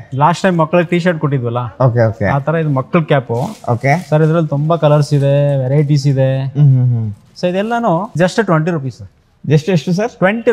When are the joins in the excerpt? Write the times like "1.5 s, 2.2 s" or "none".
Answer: 8.2 s